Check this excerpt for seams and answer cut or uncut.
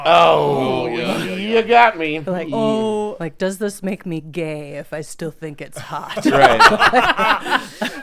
uncut